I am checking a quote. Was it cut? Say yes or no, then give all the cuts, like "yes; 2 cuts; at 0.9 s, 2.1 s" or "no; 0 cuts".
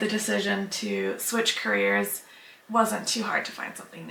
no; 0 cuts